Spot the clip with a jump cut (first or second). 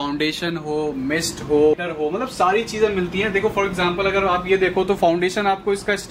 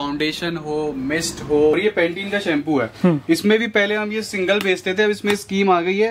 second